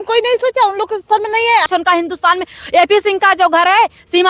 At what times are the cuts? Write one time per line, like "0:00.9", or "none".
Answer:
0:01.7